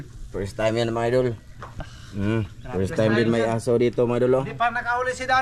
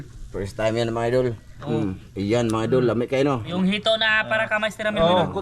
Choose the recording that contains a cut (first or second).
second